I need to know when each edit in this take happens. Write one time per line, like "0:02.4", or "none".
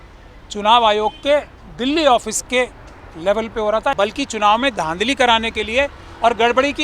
0:03.9

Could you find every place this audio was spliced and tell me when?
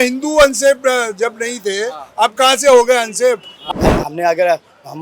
0:03.5

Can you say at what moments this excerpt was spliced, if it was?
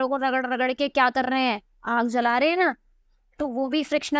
none

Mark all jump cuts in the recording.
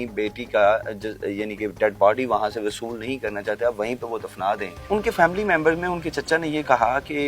0:04.7

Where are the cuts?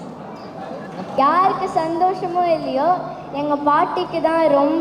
0:01.2

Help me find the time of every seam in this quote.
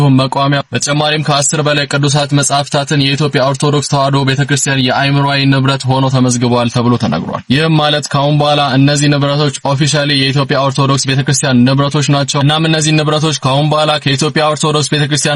none

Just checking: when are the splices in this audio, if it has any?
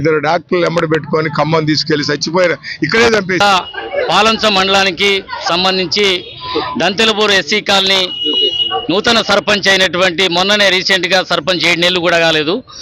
0:03.4

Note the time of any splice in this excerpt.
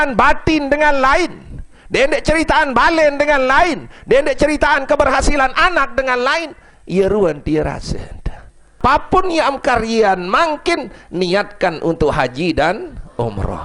0:08.8

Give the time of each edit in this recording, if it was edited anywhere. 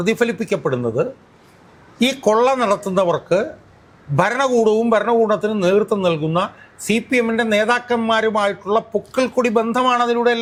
none

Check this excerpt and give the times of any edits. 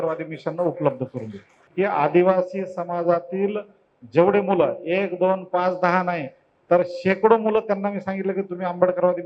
0:01.5

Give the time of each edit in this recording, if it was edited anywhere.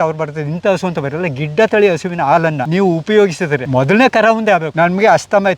0:02.6
0:03.6
0:04.7

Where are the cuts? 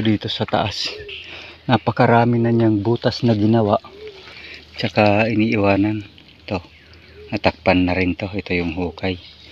none

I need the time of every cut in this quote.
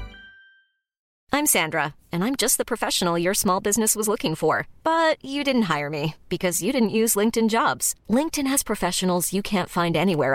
0:01.1

